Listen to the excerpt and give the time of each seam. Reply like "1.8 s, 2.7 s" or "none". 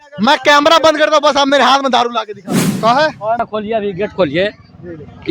3.4 s